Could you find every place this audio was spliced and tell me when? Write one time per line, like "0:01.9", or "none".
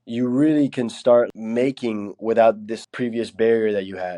0:01.3
0:02.7